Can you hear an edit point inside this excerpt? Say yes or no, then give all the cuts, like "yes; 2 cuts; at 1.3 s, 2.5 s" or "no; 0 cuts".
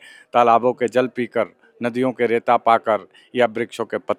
no; 0 cuts